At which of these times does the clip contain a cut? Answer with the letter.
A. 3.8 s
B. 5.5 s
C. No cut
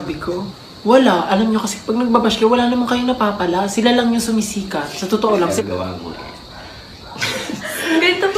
B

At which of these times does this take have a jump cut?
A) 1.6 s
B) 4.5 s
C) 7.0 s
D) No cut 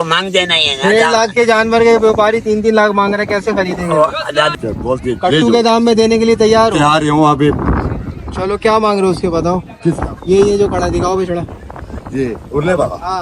B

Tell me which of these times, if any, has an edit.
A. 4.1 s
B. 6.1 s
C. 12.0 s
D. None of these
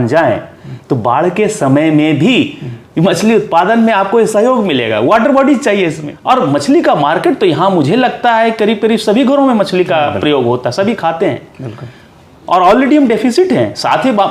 B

